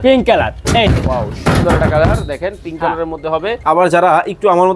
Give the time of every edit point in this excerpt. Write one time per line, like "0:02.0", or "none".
0:03.5